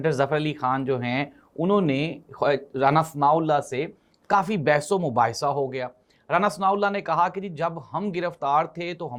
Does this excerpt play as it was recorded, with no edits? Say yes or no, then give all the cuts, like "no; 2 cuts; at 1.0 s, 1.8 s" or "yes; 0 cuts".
yes; 0 cuts